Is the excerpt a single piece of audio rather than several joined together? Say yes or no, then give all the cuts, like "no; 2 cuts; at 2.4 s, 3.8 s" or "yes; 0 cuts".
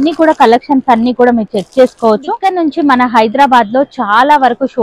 no; 1 cut; at 2.3 s